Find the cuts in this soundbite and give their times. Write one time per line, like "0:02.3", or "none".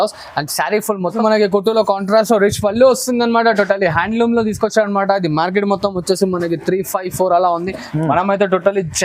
0:01.1